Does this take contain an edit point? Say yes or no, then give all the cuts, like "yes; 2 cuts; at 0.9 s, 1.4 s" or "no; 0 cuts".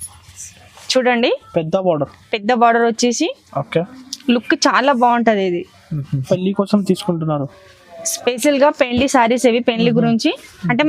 yes; 1 cut; at 6.2 s